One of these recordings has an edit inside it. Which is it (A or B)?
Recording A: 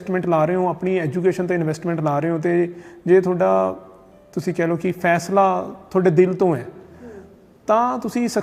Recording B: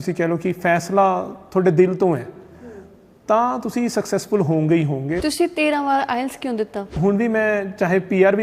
B